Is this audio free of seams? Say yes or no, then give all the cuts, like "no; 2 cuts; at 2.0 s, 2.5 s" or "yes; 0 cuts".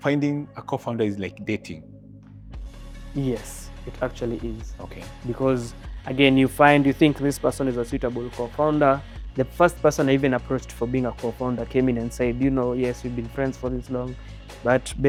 yes; 0 cuts